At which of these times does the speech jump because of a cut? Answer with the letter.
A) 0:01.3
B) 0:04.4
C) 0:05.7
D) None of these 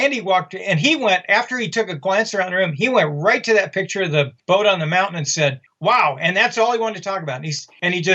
C